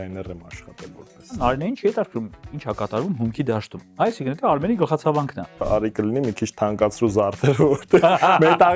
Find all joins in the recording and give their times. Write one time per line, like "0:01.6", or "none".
0:01.4
0:03.8
0:05.6

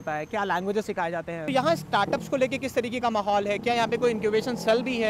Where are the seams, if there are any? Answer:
0:01.4

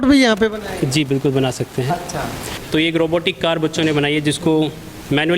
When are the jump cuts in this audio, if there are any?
0:02.6

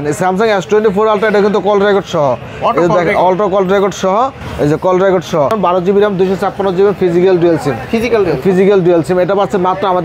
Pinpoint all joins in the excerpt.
none

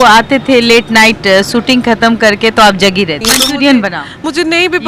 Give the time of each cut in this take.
0:03.2

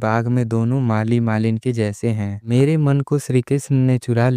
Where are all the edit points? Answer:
0:02.4

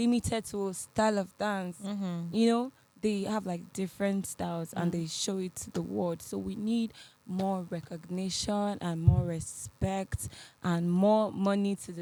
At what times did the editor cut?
none

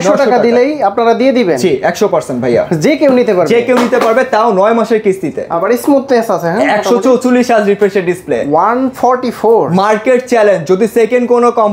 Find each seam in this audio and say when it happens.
0:05.4

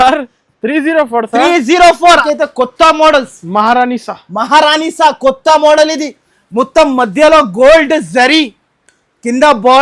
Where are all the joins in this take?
0:02.2

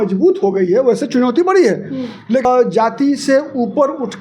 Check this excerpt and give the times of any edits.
0:02.4

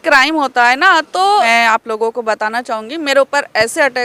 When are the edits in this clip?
0:01.5

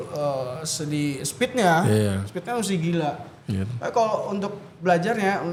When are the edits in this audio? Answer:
none

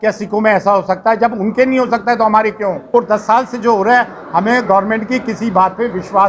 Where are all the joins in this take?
0:02.8

